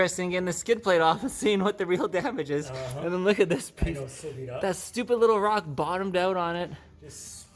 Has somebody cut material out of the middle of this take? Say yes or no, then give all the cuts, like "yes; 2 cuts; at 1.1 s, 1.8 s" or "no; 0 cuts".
no; 0 cuts